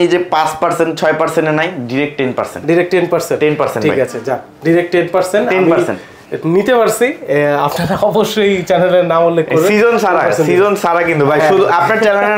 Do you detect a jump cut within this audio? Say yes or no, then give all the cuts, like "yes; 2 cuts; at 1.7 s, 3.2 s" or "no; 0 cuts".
no; 0 cuts